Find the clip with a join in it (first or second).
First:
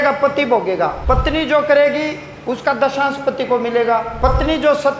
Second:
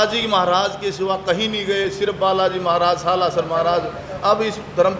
first